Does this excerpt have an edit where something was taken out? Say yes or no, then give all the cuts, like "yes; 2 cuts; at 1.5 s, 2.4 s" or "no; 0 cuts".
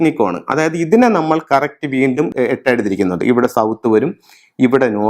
yes; 1 cut; at 2.3 s